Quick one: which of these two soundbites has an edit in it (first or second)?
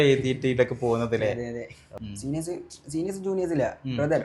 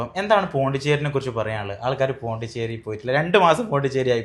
first